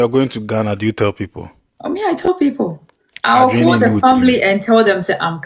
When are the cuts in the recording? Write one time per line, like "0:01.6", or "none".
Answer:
0:03.1